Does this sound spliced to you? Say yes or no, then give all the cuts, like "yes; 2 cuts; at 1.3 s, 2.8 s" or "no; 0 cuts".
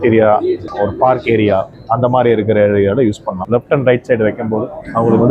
yes; 1 cut; at 3.4 s